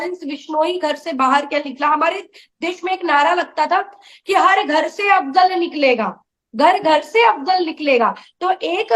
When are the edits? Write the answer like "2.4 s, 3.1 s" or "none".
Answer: none